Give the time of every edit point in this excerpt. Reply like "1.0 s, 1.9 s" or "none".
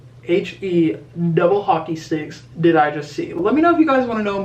3.3 s